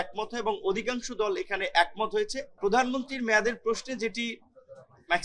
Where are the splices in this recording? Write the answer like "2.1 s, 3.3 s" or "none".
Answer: 2.5 s